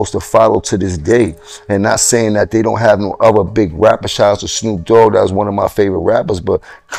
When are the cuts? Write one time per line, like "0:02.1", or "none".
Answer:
none